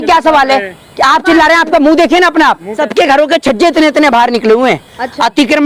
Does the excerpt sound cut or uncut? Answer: cut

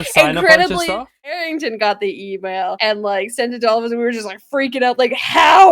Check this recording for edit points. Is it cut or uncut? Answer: cut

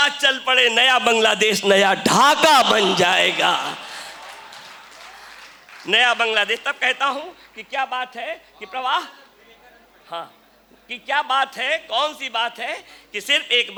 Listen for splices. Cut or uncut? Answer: uncut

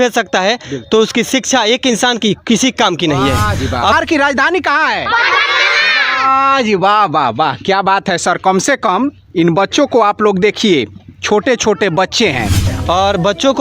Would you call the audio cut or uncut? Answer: cut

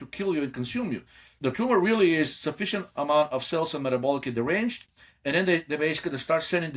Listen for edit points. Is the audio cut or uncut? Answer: cut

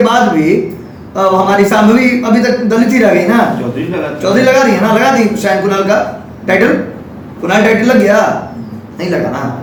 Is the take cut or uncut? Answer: uncut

